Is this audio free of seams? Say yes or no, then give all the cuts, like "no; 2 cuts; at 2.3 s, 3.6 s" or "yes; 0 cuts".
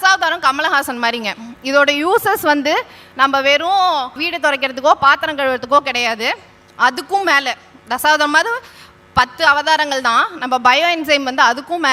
no; 1 cut; at 4.2 s